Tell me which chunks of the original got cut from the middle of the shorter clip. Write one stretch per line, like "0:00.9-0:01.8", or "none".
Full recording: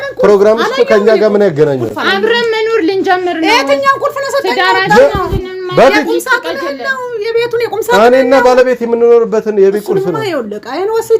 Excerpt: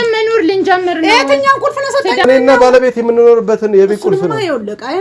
0:04.6-0:08.1